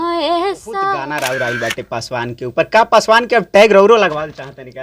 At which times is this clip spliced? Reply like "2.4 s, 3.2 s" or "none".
1.0 s